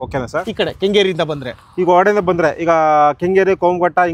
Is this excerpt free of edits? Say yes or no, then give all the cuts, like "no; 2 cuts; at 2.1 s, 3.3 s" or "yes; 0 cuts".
yes; 0 cuts